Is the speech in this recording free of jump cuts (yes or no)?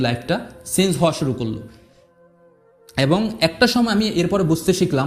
yes